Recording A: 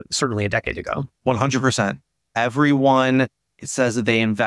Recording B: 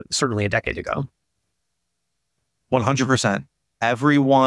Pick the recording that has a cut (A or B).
A